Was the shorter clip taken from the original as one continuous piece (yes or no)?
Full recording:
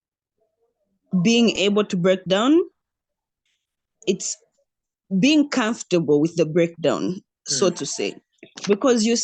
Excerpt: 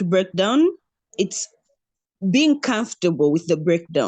no